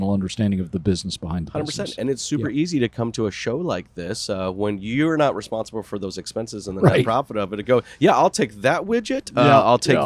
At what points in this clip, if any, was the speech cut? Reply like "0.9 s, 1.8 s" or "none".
none